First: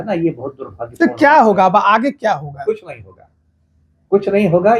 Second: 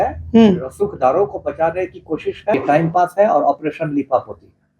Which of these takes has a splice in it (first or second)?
second